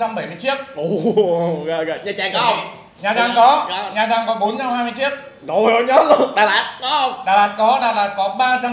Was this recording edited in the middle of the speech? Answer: no; 0 cuts

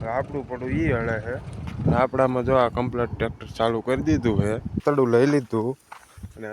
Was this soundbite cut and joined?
yes; 1 cut; at 4.8 s

